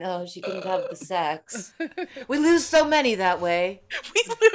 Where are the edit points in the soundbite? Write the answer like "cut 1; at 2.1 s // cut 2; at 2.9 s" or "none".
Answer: none